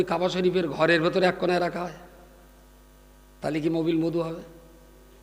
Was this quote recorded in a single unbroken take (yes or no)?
yes